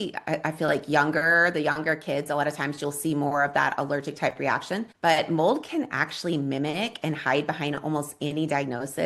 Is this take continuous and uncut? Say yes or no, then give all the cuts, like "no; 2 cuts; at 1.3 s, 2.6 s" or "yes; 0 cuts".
no; 1 cut; at 4.9 s